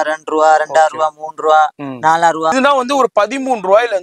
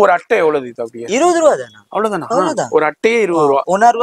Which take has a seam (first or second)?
first